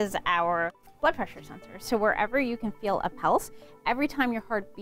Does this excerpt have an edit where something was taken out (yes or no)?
no